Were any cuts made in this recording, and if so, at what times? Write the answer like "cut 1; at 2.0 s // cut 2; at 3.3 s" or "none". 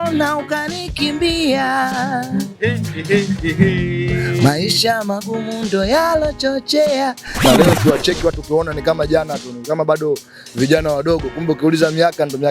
cut 1; at 7.3 s